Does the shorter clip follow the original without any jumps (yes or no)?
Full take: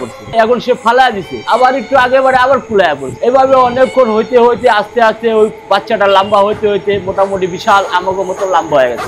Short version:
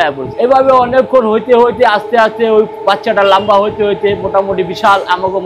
yes